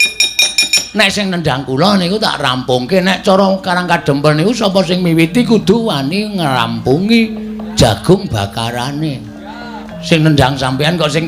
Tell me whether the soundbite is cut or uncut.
cut